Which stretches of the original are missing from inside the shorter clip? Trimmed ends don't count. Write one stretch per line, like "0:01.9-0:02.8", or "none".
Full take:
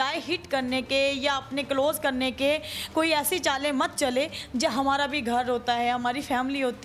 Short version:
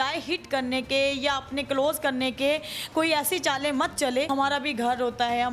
0:04.3-0:04.8

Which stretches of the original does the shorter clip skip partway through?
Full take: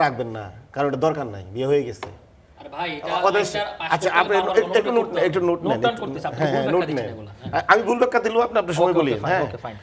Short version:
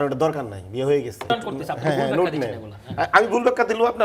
0:02.1-0:05.9

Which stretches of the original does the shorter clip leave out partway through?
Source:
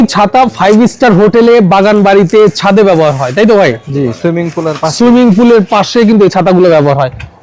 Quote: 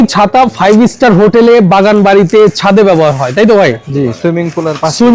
none

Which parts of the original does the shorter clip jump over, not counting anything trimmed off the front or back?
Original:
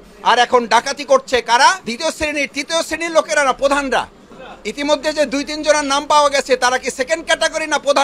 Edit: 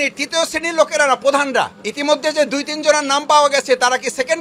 0:04.2-0:04.6

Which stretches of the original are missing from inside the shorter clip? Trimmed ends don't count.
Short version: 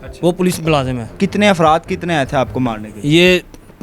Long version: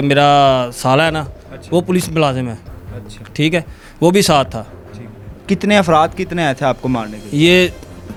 0:02.5-0:05.3

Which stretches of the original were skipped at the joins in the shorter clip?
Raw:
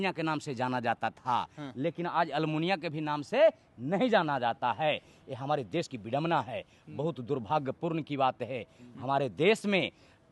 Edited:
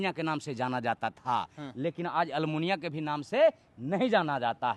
none

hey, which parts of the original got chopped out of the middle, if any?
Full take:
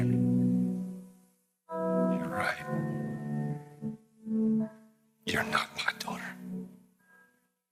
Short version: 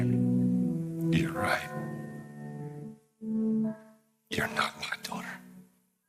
0:01.3-0:02.2

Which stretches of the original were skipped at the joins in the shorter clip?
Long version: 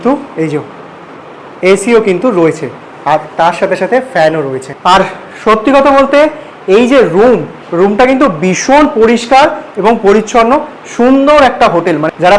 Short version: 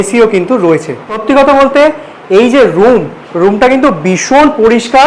0:02.9-0:05.6

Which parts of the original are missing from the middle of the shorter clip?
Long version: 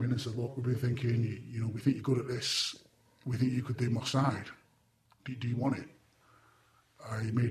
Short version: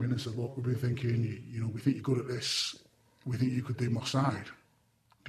none

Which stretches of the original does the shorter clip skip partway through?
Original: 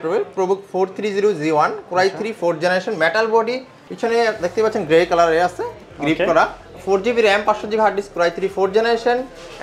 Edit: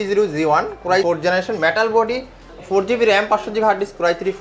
0:02.1-0:02.4
0:03.9-0:06.6

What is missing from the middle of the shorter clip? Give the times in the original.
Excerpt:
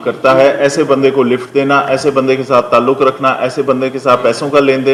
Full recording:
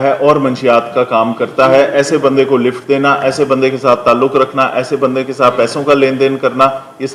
none

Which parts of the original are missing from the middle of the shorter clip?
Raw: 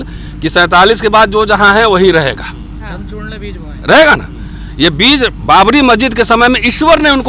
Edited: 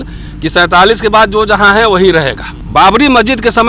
0:02.6-0:05.4

